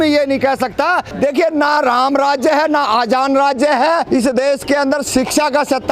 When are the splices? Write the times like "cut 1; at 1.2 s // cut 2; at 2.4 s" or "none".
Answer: cut 1; at 1.1 s // cut 2; at 4.1 s